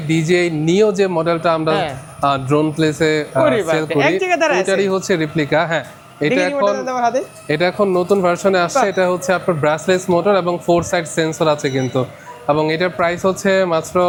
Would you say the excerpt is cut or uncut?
uncut